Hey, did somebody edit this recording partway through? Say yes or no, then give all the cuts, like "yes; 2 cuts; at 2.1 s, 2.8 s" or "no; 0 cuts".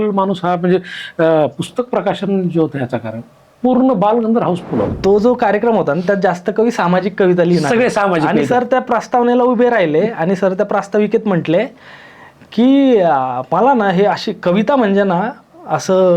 yes; 1 cut; at 4.9 s